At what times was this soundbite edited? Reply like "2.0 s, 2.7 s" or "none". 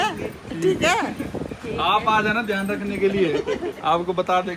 none

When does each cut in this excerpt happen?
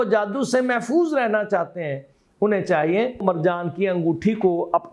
3.2 s

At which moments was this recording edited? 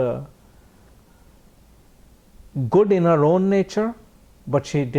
none

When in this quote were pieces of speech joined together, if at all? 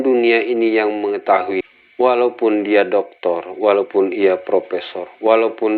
1.6 s

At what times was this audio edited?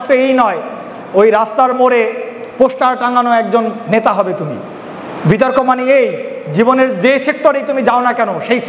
none

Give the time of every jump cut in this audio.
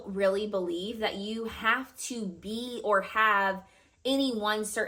none

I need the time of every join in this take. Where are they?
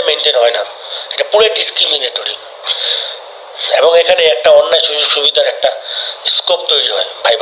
none

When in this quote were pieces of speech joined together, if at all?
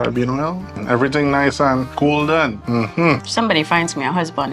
0.8 s, 1.9 s, 3.1 s

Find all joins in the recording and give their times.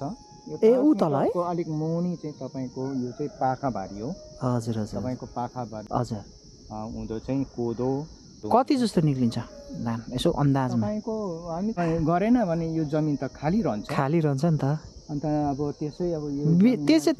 5.8 s, 11.8 s

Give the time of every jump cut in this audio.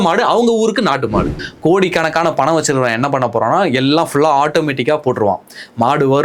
1.4 s

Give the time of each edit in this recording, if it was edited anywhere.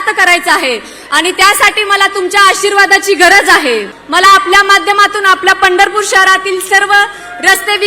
4.0 s

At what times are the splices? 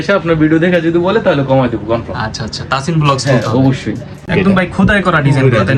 4.2 s

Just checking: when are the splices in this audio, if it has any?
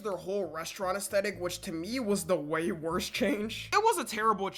none

